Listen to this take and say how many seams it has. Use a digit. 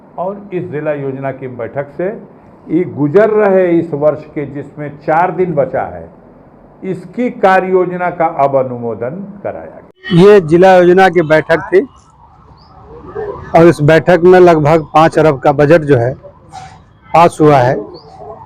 1